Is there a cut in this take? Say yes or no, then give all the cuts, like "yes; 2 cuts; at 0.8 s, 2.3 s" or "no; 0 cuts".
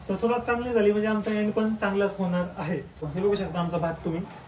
yes; 1 cut; at 3.0 s